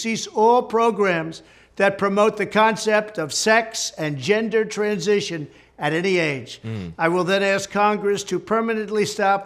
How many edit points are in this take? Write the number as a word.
zero